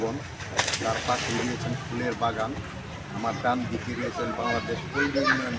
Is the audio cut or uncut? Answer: uncut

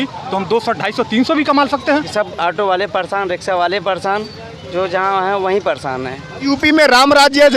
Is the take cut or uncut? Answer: cut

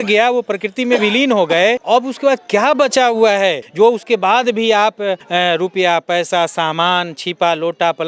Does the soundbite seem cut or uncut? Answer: uncut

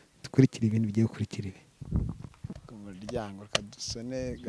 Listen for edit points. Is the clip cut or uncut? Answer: cut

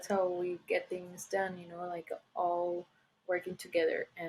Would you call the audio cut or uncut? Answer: uncut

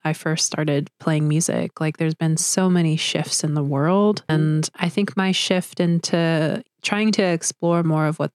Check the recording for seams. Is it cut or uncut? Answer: cut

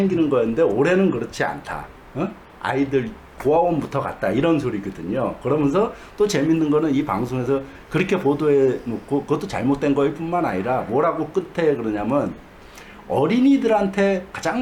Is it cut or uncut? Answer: uncut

